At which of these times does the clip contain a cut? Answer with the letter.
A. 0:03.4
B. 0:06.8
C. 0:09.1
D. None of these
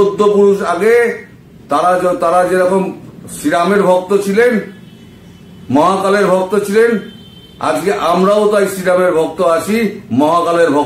D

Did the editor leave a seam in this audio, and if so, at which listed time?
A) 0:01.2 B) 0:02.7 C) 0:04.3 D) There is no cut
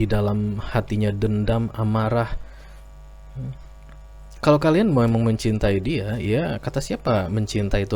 D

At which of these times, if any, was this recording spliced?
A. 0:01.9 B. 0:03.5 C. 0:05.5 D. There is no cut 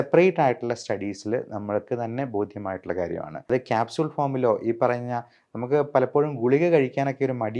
B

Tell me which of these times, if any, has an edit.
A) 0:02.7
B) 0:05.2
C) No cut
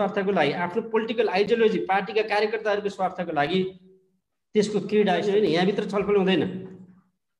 B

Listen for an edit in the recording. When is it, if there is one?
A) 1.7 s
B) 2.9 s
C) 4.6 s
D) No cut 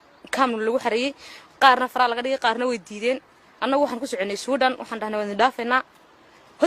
C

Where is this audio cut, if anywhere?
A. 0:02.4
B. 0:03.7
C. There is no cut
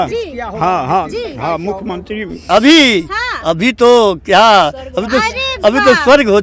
A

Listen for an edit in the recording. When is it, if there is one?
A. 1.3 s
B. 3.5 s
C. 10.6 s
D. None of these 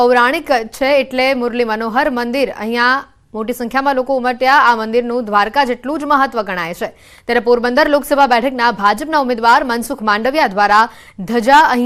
D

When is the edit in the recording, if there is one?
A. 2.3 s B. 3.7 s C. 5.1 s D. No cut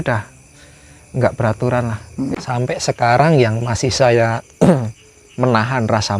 A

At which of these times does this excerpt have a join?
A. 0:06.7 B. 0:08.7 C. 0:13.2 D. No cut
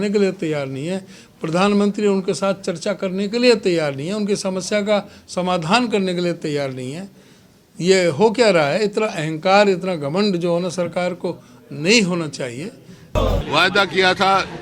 C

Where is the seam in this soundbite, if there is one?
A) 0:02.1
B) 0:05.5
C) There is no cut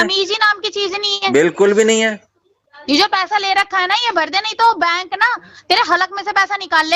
C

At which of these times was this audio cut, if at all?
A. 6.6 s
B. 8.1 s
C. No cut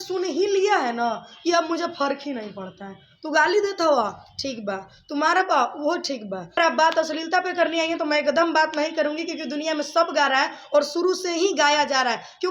A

